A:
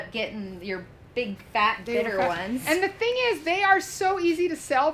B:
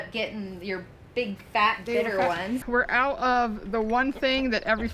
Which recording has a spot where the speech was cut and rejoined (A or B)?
B